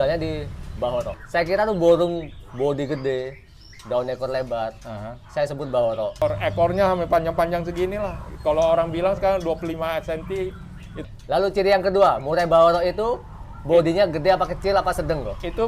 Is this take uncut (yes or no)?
no